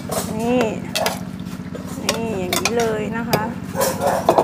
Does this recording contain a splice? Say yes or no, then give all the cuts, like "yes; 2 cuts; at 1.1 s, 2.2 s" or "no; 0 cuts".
no; 0 cuts